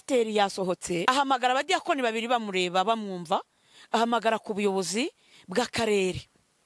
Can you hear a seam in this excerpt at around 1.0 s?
yes; 1 cut; at 1.0 s

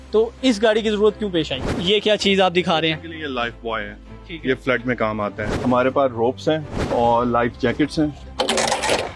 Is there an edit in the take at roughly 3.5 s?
no; 4 cuts; at 1.8 s, 5.5 s, 6.8 s, 8.2 s

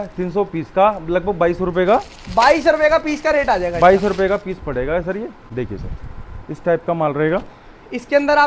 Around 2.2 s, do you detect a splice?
no; 1 cut; at 5.4 s

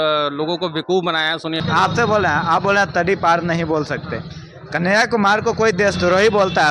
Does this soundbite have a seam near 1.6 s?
yes; 1 cut; at 1.6 s

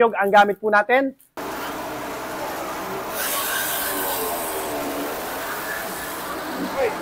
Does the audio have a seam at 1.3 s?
yes; 1 cut; at 1.3 s

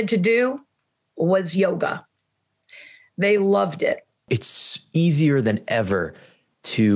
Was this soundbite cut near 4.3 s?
yes; 1 cut; at 4.3 s

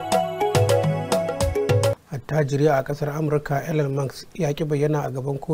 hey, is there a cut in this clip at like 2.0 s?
yes; 1 cut; at 2.0 s

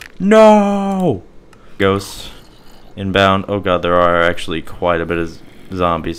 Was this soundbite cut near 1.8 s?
yes; 1 cut; at 1.8 s

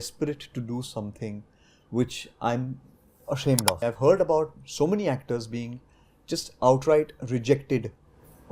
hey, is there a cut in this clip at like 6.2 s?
no; 1 cut; at 3.8 s

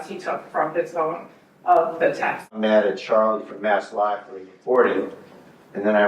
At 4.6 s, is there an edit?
no; 1 cut; at 2.4 s

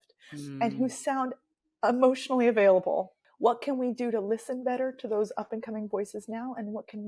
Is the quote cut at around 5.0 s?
no; 1 cut; at 3.2 s

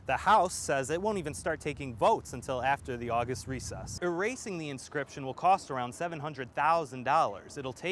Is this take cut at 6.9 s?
no; 1 cut; at 3.8 s

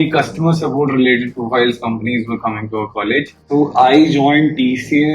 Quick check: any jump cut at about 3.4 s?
yes; 1 cut; at 3.4 s

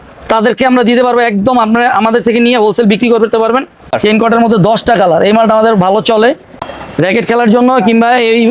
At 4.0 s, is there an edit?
yes; 2 cuts; at 4.0 s, 6.5 s

